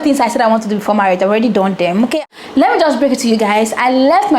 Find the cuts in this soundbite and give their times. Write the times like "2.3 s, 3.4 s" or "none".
2.2 s